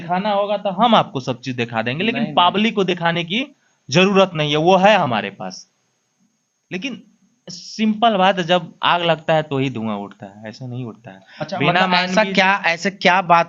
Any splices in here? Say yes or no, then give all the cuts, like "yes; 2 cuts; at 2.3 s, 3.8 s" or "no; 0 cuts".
no; 0 cuts